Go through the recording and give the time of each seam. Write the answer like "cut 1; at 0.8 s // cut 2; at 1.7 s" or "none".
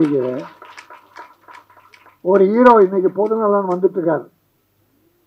none